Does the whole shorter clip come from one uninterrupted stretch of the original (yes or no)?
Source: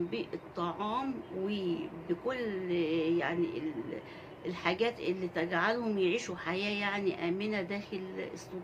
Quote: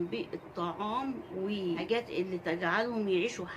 no